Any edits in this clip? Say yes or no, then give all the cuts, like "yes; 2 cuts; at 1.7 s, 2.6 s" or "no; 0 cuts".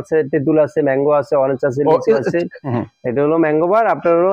yes; 1 cut; at 2.1 s